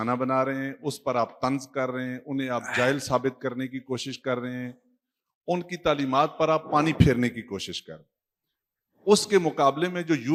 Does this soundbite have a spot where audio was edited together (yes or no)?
no